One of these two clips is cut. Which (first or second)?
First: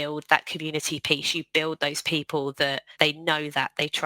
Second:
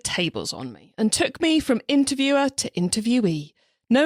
first